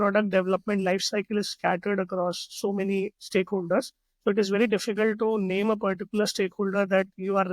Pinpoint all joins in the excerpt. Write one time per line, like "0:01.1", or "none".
none